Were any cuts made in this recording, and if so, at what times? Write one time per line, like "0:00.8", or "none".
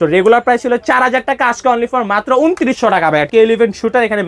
0:03.3